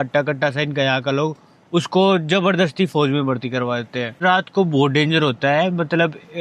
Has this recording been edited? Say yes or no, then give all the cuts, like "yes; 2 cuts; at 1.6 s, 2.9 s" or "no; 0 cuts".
yes; 1 cut; at 4.2 s